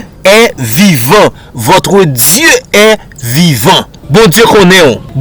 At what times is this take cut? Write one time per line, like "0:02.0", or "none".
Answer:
0:03.9